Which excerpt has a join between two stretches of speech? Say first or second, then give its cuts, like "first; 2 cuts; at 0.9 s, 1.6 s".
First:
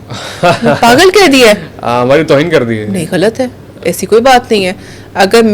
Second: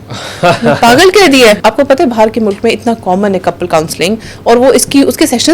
second; 1 cut; at 1.6 s